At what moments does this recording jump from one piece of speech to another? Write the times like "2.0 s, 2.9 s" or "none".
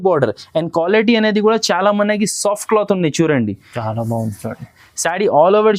none

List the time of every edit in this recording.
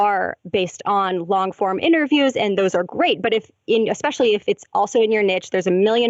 none

